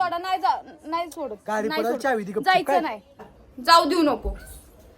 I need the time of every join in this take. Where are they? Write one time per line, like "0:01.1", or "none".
0:03.2